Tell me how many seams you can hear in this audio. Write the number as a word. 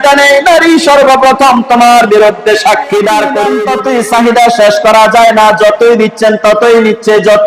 one